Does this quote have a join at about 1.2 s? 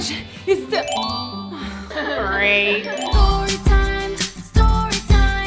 no; 1 cut; at 3.2 s

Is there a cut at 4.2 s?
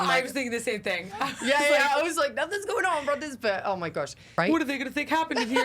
yes; 1 cut; at 4.2 s

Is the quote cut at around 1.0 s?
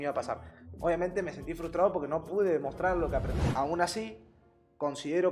no; 1 cut; at 3.4 s

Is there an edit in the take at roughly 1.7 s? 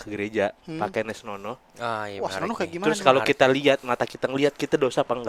no; 0 cuts

